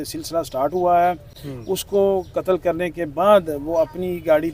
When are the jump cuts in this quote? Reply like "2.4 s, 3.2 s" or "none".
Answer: none